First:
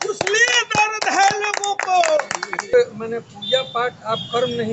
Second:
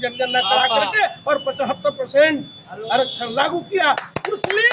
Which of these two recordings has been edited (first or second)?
first